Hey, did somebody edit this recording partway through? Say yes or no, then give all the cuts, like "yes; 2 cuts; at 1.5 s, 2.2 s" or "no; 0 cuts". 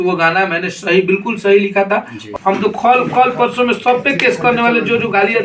yes; 1 cut; at 2.3 s